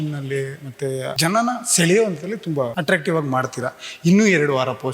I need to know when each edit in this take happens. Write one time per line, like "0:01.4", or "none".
0:01.1
0:02.8